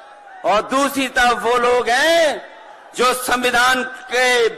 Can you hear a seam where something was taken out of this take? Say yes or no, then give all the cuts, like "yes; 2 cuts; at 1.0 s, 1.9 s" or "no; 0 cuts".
no; 0 cuts